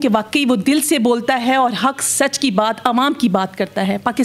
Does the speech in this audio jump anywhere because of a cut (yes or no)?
no